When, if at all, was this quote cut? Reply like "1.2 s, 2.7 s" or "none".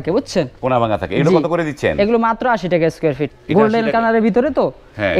3.3 s